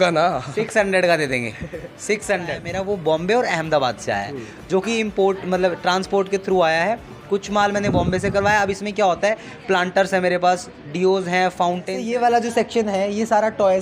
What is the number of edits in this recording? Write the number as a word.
two